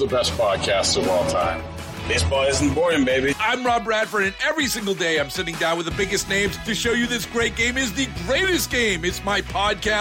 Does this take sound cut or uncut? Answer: uncut